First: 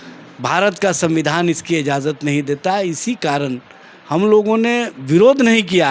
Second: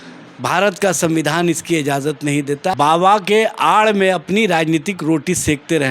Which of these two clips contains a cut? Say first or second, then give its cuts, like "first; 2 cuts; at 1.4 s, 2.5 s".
second; 1 cut; at 2.7 s